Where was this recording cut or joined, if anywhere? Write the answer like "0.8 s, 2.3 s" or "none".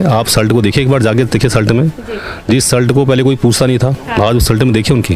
none